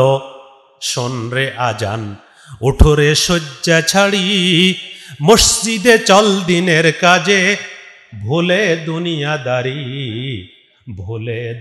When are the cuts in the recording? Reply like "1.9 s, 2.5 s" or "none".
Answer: none